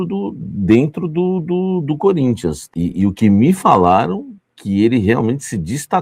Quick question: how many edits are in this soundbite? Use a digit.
0